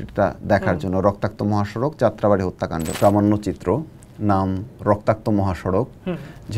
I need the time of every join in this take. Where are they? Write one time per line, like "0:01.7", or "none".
0:02.9